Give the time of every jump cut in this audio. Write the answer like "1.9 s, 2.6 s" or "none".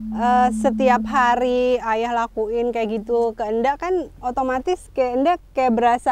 none